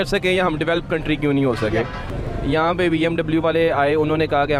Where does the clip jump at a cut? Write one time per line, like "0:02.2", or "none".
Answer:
0:02.1

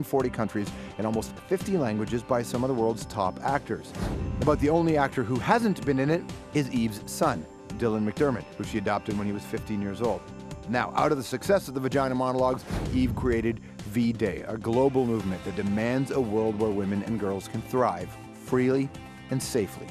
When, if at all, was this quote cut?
none

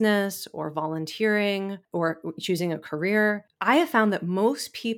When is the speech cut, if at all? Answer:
0:01.8
0:03.5

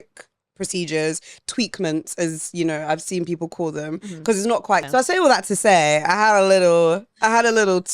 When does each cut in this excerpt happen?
0:04.8

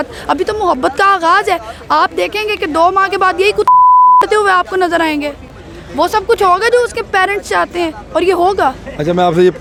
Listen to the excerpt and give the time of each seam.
none

